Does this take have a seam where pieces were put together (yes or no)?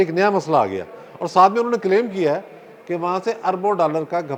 no